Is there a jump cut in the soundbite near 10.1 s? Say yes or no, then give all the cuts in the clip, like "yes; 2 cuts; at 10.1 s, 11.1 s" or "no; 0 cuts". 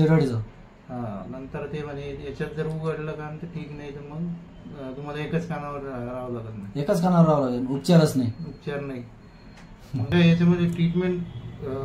yes; 1 cut; at 10.1 s